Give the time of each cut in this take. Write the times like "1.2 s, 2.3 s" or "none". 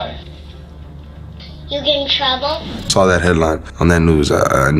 2.9 s